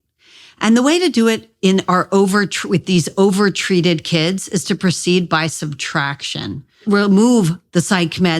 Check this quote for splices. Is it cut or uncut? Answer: cut